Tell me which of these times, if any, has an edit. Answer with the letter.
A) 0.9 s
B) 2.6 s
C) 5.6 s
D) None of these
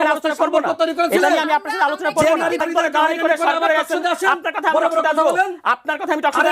B